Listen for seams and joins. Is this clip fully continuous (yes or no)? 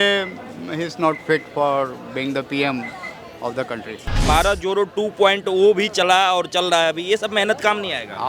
no